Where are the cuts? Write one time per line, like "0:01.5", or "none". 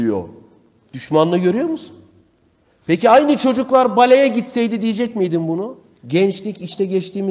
0:05.8